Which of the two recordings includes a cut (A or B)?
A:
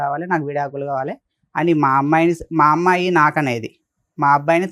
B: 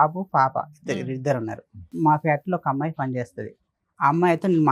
B